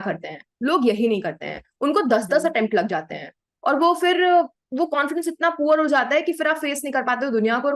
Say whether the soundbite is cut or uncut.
uncut